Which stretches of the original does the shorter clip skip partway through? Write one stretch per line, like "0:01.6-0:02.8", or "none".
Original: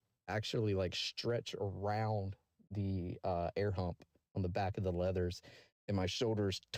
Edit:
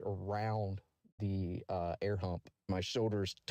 0:04.1-0:05.8